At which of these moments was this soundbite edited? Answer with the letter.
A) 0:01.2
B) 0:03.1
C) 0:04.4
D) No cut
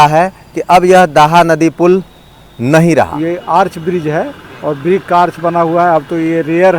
B